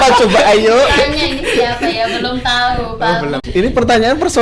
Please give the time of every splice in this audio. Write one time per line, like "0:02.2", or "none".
0:03.4

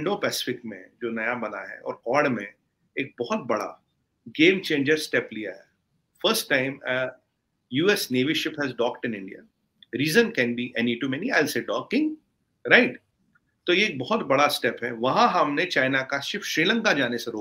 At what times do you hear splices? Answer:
none

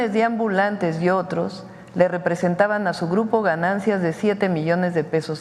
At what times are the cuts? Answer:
none

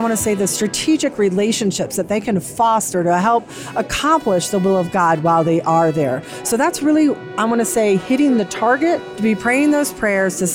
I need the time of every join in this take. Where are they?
0:09.1

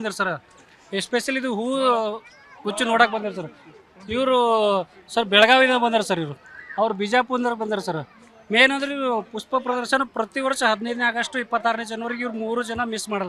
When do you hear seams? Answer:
none

